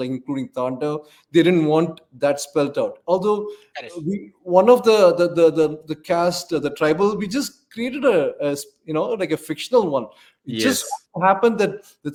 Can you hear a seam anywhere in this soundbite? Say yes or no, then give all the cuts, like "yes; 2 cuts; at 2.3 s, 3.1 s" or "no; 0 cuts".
no; 0 cuts